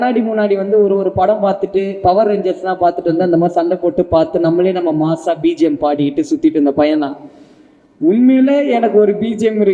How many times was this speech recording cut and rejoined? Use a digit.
0